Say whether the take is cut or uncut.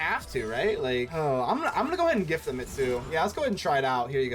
cut